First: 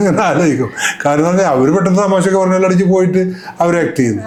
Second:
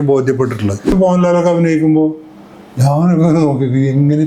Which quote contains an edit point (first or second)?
second